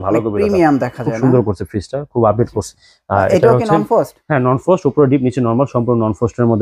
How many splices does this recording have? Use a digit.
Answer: 1